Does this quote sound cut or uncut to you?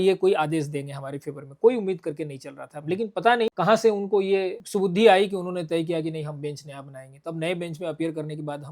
cut